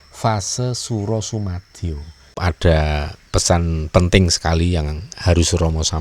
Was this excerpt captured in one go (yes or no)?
no